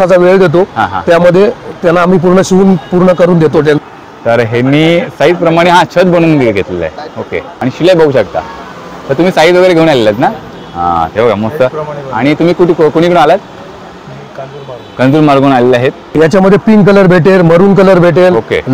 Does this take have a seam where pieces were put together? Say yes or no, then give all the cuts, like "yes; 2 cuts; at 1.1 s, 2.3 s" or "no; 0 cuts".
yes; 3 cuts; at 3.8 s, 7.4 s, 16.0 s